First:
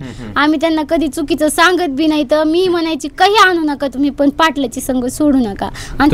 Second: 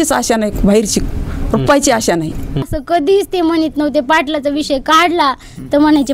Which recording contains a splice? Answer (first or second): second